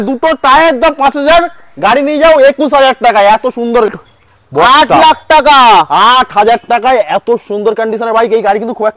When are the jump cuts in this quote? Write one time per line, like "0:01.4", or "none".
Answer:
0:03.9